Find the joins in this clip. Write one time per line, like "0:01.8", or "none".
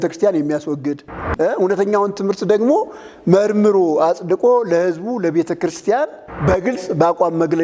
0:06.0

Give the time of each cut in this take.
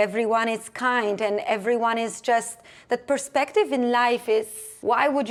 none

